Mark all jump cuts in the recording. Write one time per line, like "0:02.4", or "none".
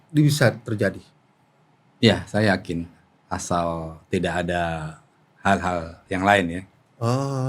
none